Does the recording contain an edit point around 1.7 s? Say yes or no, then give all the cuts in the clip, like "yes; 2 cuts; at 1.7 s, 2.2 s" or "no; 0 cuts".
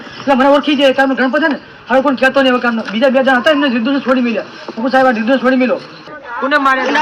no; 1 cut; at 6.0 s